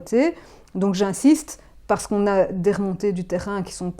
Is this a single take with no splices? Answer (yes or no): yes